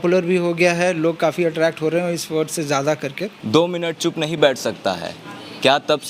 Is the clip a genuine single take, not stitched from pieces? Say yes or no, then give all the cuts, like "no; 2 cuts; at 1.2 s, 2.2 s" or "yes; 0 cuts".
no; 1 cut; at 3.3 s